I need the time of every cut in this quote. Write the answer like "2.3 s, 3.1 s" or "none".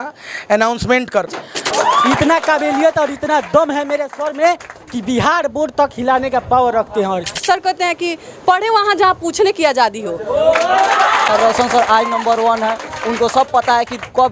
1.6 s, 7.4 s, 11.3 s